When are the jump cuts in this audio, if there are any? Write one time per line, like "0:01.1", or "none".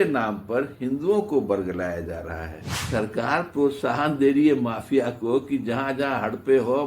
0:02.7